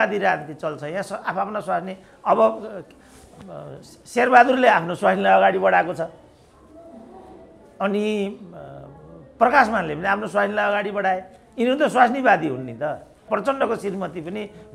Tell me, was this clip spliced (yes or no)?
yes